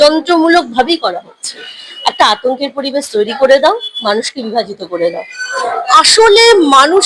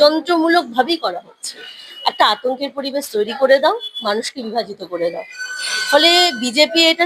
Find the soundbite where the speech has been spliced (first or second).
first